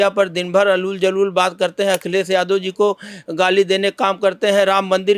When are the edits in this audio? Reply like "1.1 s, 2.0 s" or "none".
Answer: none